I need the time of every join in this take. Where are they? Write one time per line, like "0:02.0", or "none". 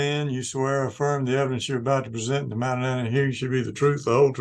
none